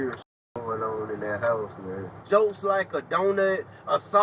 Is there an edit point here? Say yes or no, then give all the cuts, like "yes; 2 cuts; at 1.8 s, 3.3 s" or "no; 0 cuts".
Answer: yes; 1 cut; at 2.2 s